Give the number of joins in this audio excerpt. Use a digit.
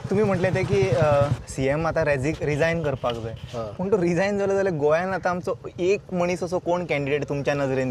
0